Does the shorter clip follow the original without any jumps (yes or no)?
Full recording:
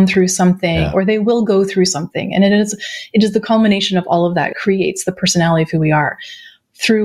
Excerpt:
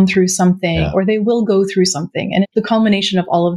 no